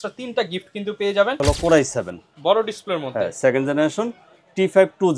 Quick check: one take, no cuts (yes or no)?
no